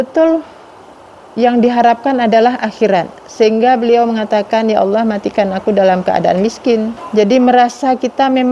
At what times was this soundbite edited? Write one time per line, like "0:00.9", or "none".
0:07.0